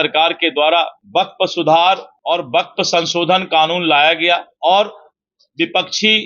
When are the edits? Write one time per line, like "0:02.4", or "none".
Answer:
0:01.0
0:02.1
0:04.5